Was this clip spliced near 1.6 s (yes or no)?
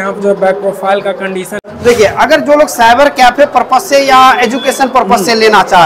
yes